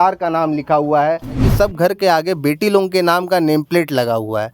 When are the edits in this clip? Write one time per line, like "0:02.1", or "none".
0:01.5